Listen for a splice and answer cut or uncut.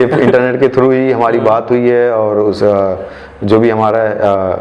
uncut